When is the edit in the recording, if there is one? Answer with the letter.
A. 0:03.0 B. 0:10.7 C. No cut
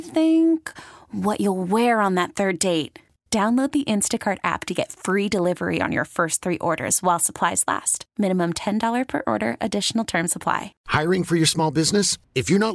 B